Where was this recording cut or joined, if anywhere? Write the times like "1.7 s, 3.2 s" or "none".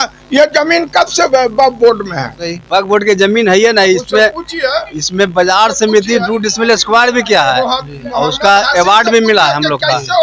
2.6 s